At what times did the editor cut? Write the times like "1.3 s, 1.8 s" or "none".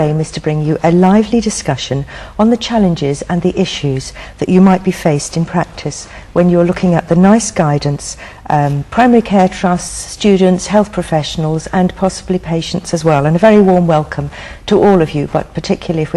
none